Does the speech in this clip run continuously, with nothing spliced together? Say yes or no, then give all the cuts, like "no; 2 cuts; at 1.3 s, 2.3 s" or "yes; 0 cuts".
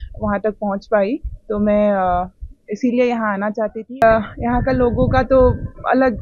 no; 1 cut; at 4.0 s